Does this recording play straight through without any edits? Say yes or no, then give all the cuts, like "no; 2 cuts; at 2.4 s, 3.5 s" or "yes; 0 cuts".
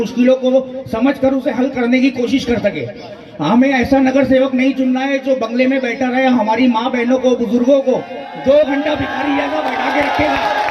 yes; 0 cuts